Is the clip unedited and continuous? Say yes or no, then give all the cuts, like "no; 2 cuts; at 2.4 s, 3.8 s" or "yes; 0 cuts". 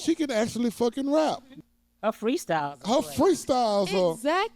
no; 1 cut; at 1.5 s